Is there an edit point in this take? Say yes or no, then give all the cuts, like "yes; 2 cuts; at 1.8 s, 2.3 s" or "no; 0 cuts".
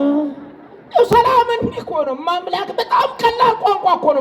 no; 0 cuts